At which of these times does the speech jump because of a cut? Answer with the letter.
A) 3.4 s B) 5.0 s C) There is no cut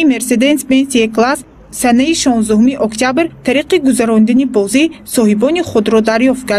A